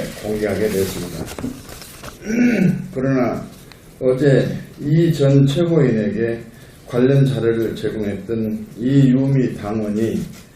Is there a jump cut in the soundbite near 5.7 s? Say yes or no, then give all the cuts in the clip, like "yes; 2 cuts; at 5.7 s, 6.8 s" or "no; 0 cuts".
yes; 1 cut; at 5.7 s